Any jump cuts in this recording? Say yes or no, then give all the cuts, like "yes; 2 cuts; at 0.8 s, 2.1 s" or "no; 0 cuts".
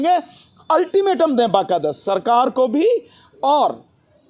no; 0 cuts